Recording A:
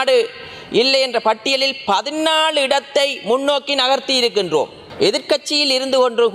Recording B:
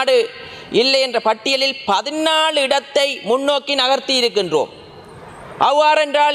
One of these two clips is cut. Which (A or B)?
A